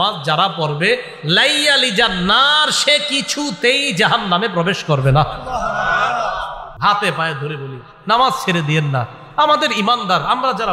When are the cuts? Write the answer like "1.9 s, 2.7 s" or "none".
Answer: 6.7 s